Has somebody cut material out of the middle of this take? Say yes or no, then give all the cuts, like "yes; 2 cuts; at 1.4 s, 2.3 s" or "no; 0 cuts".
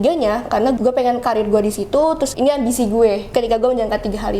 yes; 3 cuts; at 0.8 s, 2.3 s, 3.3 s